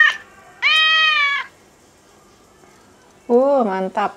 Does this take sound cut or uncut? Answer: uncut